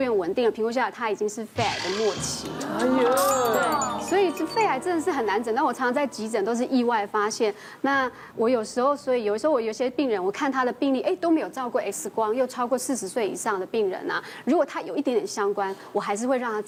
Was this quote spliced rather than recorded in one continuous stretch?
no; 0 cuts

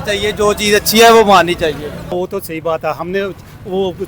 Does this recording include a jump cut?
yes; 1 cut; at 2.1 s

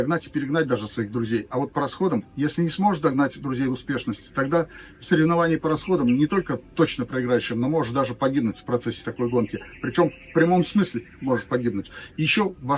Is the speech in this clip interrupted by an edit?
no; 0 cuts

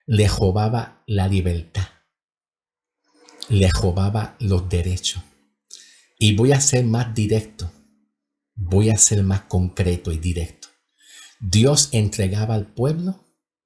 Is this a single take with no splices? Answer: yes; 0 cuts

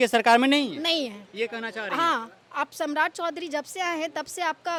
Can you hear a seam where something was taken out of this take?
no; 0 cuts

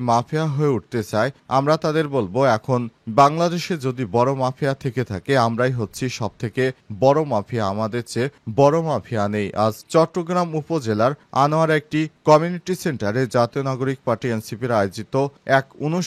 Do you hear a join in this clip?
no; 0 cuts

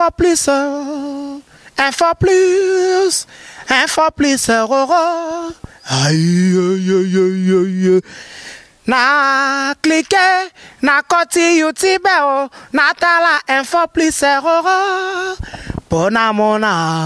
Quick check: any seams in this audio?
no; 0 cuts

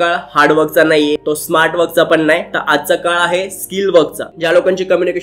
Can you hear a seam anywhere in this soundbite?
yes; 2 cuts; at 1.2 s, 4.3 s

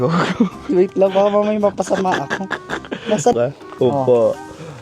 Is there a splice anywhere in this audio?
yes; 1 cut; at 3.3 s

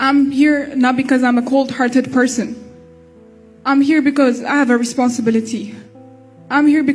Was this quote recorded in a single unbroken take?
yes; 0 cuts

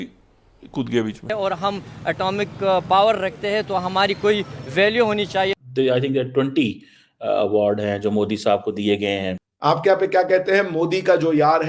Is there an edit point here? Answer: yes; 2 cuts; at 1.3 s, 9.3 s

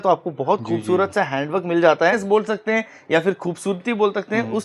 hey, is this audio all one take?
no; 1 cut; at 2.2 s

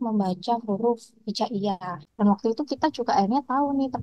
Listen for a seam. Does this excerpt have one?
yes; 1 cut; at 2.0 s

